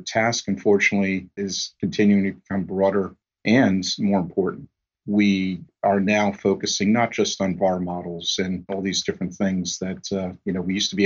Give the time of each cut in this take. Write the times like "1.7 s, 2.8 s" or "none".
1.4 s, 8.7 s